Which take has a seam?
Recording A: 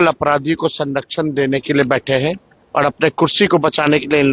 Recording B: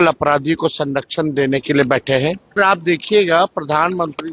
B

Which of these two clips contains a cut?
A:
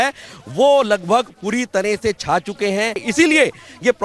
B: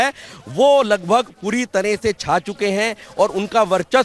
A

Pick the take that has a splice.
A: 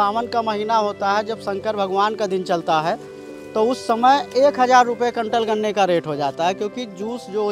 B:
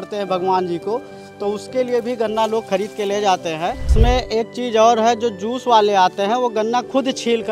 B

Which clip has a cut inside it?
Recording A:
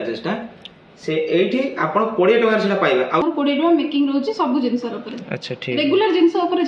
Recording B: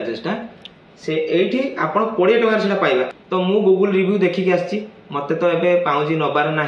A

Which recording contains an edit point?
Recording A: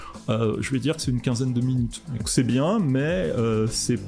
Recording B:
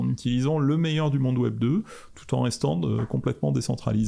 A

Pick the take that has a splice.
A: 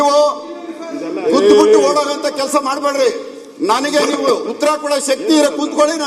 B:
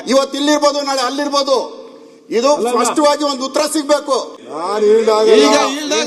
B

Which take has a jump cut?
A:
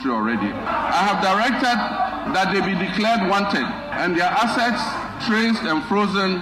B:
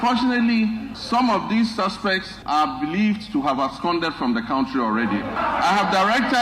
B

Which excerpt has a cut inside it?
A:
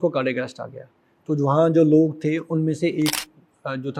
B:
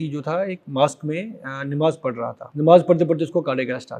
B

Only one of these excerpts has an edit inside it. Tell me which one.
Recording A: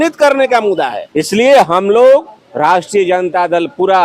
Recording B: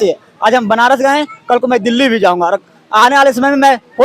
A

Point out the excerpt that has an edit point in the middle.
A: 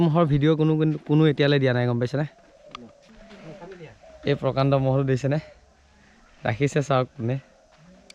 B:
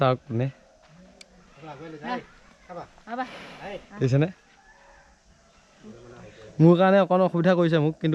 A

